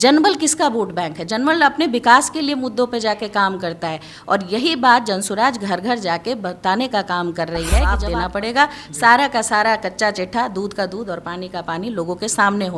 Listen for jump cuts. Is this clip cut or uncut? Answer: cut